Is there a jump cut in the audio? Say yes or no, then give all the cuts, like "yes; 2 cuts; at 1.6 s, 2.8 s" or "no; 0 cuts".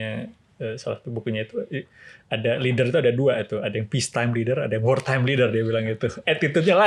no; 0 cuts